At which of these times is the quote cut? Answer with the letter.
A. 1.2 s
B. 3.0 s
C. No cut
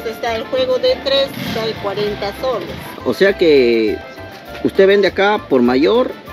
B